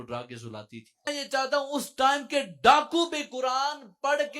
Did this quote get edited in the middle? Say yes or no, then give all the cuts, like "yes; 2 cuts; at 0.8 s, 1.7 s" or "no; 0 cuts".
yes; 1 cut; at 1.1 s